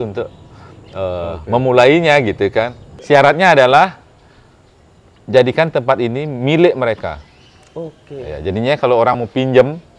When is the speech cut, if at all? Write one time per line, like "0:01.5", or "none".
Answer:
0:02.9